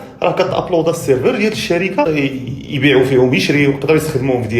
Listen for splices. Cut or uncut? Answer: cut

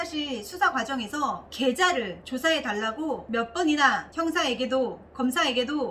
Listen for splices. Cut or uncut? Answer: uncut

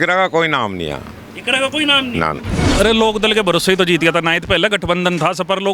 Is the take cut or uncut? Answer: cut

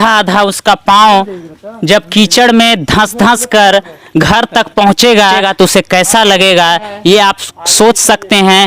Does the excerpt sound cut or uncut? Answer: cut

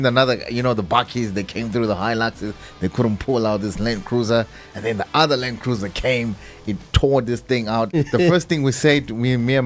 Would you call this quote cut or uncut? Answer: cut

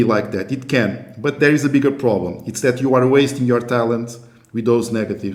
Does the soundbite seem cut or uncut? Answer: uncut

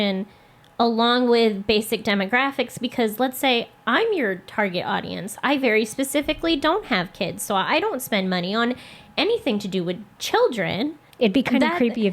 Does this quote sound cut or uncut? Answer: cut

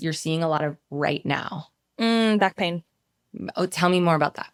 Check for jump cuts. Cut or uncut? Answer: uncut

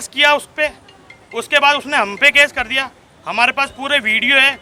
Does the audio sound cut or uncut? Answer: uncut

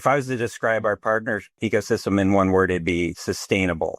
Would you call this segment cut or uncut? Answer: cut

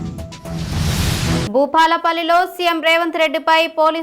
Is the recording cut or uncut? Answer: uncut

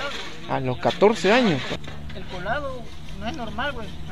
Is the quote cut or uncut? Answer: cut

